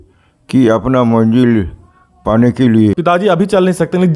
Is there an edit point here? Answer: yes; 1 cut; at 3.0 s

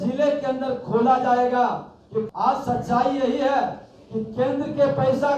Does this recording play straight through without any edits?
no; 1 cut; at 2.3 s

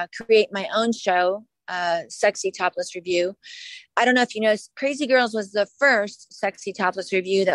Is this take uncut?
yes; 0 cuts

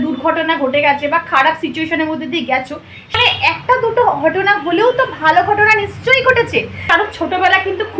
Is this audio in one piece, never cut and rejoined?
no; 2 cuts; at 3.2 s, 6.8 s

